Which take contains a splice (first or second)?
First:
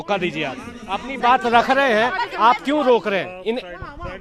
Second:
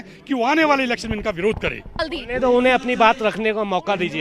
second